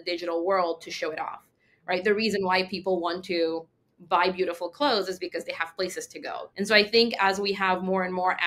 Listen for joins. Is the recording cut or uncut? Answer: cut